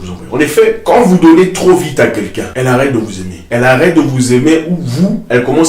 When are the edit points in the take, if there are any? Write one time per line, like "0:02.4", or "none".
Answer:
0:00.8
0:02.4
0:03.3